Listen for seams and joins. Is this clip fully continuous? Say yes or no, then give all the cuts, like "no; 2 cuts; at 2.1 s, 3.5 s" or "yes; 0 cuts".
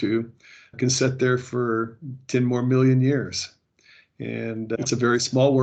yes; 0 cuts